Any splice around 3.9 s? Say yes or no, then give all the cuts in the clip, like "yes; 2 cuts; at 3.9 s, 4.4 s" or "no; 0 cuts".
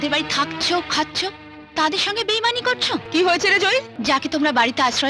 yes; 1 cut; at 3.9 s